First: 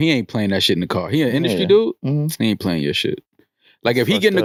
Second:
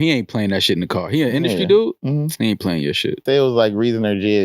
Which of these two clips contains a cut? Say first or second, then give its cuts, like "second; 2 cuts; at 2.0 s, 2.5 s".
second; 1 cut; at 3.2 s